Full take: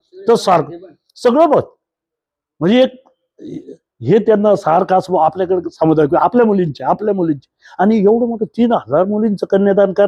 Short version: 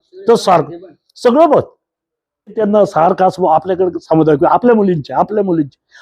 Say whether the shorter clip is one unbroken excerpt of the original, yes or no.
no